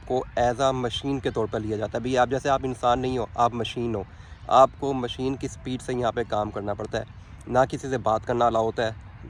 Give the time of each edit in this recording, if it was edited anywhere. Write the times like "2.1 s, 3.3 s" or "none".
none